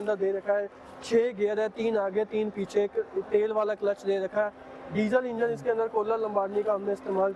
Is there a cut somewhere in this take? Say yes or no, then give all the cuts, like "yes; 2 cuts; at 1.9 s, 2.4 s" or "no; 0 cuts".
no; 0 cuts